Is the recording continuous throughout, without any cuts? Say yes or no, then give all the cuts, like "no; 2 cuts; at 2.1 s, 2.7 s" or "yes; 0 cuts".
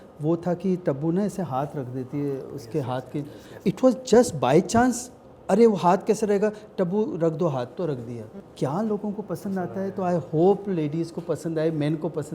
no; 2 cuts; at 3.5 s, 8.3 s